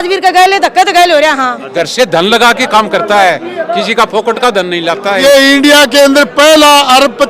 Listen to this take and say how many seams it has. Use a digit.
2